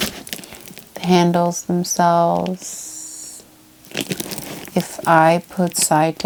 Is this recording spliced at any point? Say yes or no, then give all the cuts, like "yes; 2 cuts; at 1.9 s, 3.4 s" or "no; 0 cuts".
no; 0 cuts